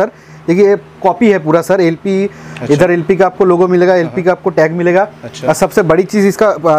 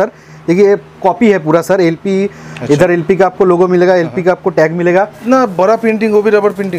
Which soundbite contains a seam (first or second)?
second